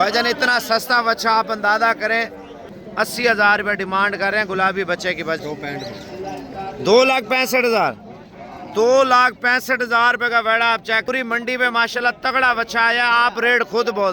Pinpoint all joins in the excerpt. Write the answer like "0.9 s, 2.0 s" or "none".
2.8 s, 5.4 s, 11.1 s